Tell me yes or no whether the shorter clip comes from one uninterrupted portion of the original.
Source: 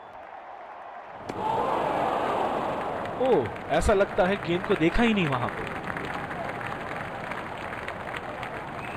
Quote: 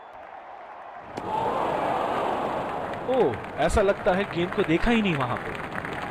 no